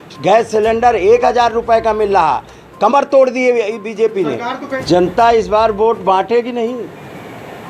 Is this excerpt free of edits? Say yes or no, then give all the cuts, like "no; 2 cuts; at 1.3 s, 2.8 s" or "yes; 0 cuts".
no; 1 cut; at 4.7 s